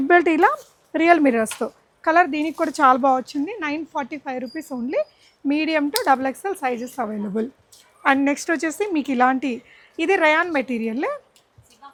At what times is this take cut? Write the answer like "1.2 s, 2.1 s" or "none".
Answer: none

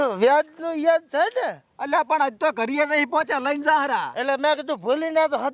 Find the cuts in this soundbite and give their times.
none

